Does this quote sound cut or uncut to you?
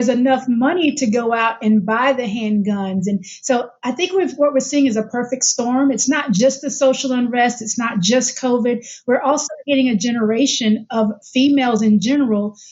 uncut